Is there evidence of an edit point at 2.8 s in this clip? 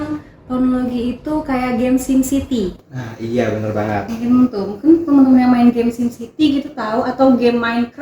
yes; 1 cut; at 2.8 s

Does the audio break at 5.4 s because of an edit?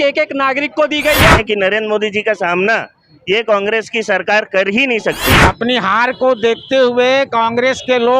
yes; 2 cuts; at 1.4 s, 5.4 s

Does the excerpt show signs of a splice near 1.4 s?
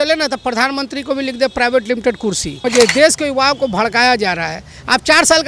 no; 1 cut; at 2.6 s

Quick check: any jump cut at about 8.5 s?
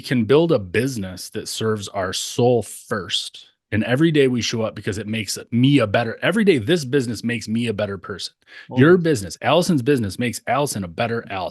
no; 0 cuts

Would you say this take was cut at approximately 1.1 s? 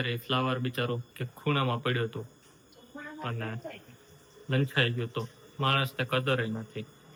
no; 0 cuts

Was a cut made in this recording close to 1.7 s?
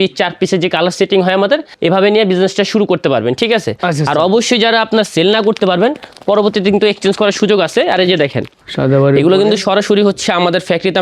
yes; 2 cuts; at 1.7 s, 8.6 s

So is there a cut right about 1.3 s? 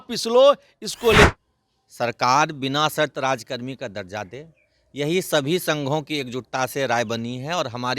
yes; 1 cut; at 1.3 s

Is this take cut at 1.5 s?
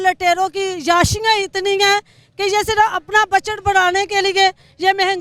no; 0 cuts

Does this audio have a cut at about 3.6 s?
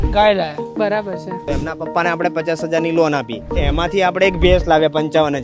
yes; 2 cuts; at 1.4 s, 3.6 s

